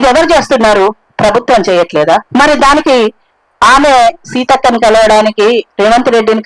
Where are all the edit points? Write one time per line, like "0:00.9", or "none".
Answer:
0:02.3